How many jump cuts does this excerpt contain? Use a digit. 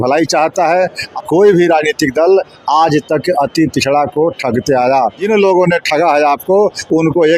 2